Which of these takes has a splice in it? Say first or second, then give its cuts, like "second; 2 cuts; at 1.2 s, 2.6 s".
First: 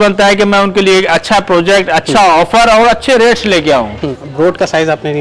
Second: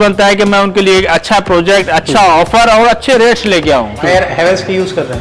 second; 1 cut; at 4.1 s